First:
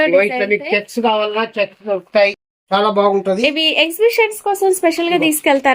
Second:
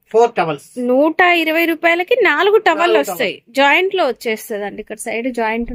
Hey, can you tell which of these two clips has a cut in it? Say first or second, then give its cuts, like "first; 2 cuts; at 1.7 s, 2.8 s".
first; 1 cut; at 2.4 s